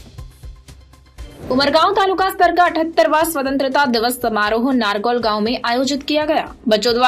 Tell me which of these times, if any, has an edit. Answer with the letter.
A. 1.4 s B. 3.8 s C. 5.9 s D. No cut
A